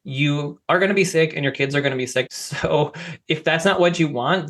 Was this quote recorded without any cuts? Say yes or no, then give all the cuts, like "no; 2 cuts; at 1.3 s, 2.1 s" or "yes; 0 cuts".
no; 1 cut; at 2.3 s